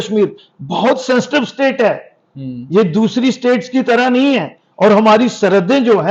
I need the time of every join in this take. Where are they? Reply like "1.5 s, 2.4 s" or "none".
none

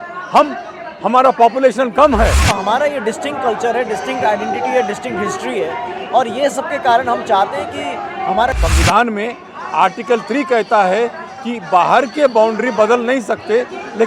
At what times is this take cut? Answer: 2.5 s, 8.5 s

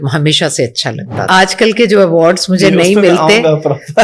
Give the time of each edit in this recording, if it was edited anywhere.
1.3 s

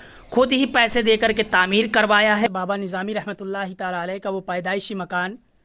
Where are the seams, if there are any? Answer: 2.5 s

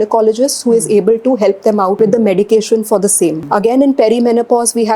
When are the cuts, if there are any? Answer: 1.9 s, 3.4 s

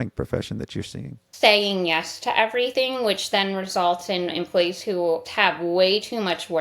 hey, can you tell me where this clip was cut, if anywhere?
1.2 s, 2.7 s, 5.3 s

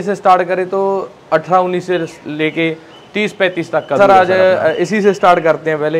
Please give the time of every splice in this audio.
4.0 s

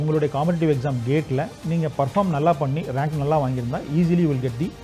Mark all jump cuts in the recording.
none

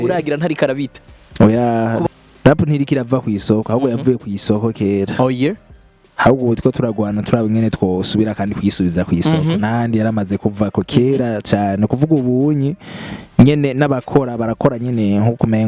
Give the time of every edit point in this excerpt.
2.1 s

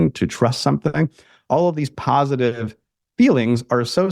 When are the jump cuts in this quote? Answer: none

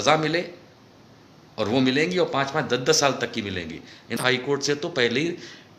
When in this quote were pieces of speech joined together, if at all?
4.2 s

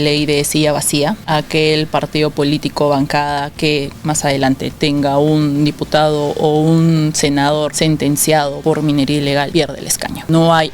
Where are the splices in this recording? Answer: 1.2 s, 7.7 s, 8.6 s, 9.6 s

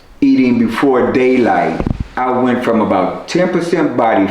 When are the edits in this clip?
2.0 s

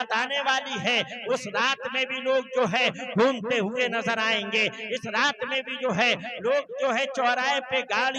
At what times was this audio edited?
1.2 s

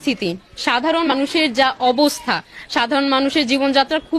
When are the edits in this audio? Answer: 1.1 s

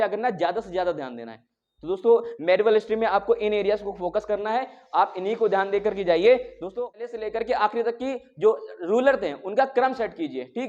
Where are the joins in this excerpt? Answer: 6.8 s

